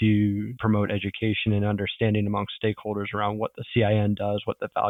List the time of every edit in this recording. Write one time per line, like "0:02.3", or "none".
none